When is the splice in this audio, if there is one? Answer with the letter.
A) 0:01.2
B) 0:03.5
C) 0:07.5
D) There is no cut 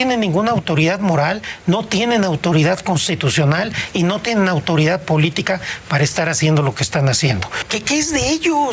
C